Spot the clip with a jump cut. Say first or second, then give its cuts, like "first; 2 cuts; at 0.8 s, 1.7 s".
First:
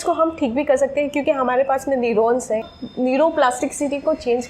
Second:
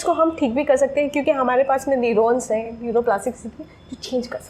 first; 1 cut; at 2.8 s